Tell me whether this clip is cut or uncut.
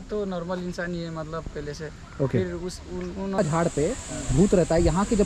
cut